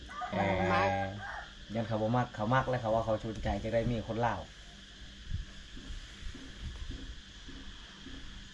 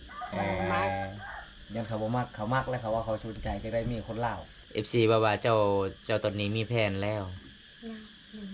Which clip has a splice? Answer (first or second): second